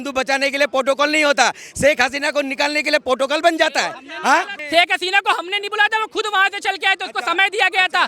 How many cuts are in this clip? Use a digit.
1